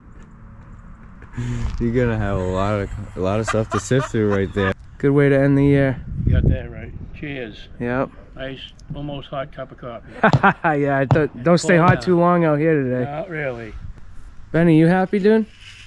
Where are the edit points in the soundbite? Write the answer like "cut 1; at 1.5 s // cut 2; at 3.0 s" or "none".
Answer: cut 1; at 4.9 s // cut 2; at 13.9 s